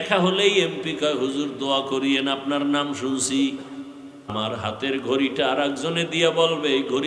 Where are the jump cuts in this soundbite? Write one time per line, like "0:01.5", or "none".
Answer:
0:04.3